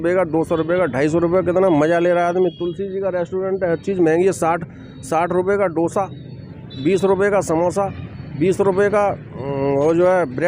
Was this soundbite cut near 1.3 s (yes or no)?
no